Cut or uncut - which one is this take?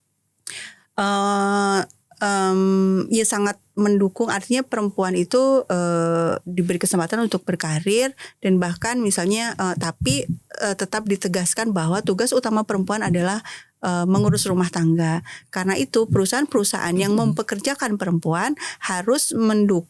uncut